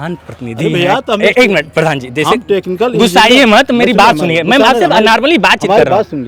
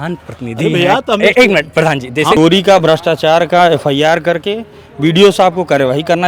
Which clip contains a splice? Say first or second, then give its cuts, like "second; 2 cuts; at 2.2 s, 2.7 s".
second; 1 cut; at 2.4 s